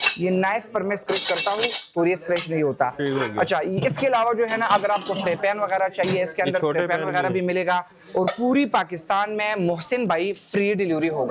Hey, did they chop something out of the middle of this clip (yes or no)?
no